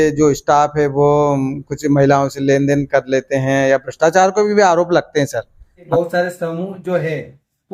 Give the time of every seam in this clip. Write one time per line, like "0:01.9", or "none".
0:05.8

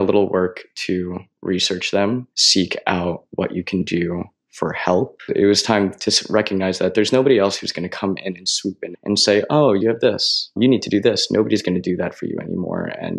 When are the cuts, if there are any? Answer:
0:02.4
0:05.3

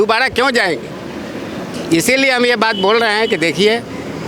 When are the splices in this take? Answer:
none

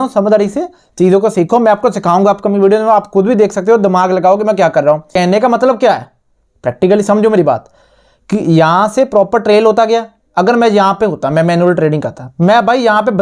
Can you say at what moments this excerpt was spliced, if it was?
0:05.1

